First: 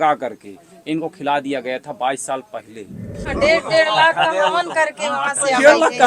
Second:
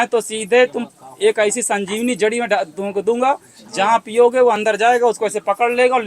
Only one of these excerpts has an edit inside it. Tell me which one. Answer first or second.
first